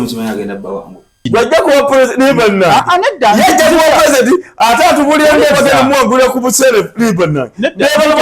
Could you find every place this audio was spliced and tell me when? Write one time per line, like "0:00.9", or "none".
0:01.2